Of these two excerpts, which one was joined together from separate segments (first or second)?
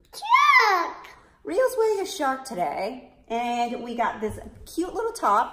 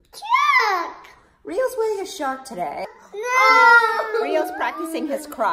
second